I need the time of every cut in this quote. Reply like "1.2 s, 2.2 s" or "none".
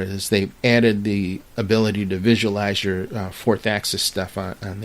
1.4 s